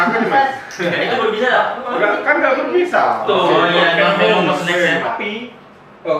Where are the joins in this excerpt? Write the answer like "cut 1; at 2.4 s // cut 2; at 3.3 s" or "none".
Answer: cut 1; at 5.2 s